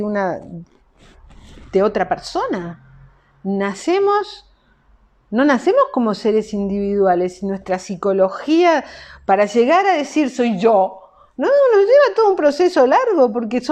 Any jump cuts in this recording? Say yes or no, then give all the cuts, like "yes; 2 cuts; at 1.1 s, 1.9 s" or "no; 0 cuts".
no; 0 cuts